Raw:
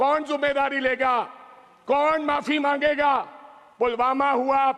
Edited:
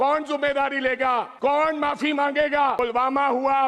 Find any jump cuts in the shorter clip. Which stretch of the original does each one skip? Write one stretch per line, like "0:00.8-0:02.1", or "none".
0:01.3-0:01.8
0:03.2-0:03.8